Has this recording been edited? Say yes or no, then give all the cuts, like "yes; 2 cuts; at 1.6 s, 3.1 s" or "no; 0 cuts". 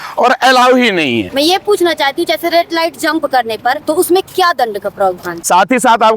yes; 3 cuts; at 1.3 s, 3.8 s, 5.5 s